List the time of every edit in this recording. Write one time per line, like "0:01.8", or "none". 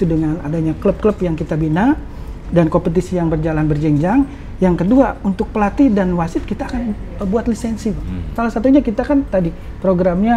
0:08.3